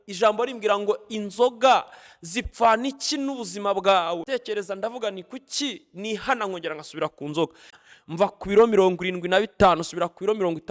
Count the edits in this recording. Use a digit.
2